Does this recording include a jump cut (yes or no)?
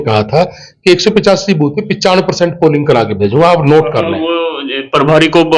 no